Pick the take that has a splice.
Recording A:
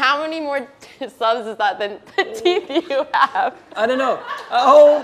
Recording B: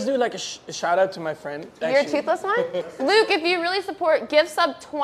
B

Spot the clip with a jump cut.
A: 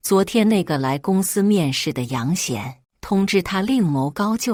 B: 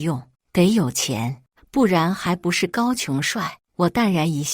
B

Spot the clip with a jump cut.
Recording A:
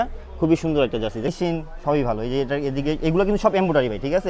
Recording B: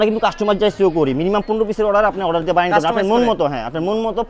A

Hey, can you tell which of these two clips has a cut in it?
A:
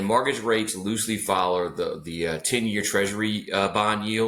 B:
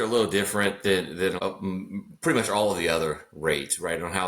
B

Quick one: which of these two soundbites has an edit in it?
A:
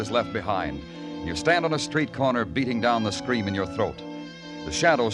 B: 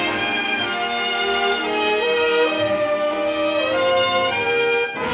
B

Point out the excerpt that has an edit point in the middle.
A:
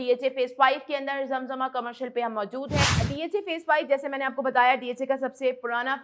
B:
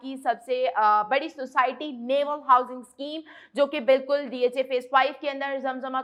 A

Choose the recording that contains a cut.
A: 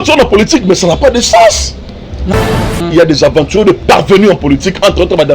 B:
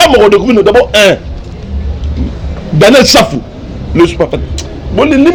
A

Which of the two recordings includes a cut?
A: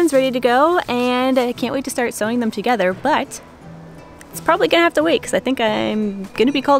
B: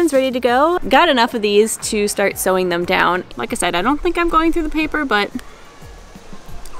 B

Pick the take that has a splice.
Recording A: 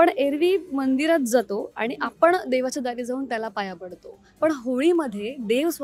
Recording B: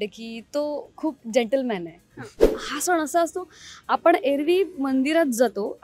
B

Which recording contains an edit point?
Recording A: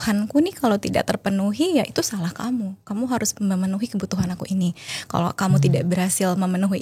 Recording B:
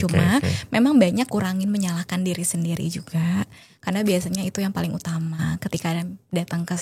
B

